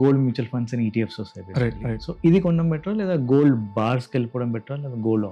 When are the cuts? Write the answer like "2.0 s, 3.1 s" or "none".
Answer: none